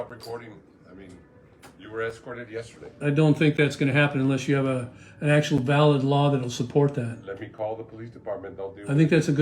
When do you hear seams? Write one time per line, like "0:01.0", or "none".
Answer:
0:03.0